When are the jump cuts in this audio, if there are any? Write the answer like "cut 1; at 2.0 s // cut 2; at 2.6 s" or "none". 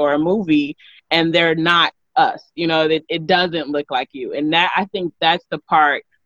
none